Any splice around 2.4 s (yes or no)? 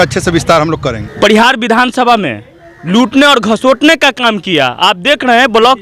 no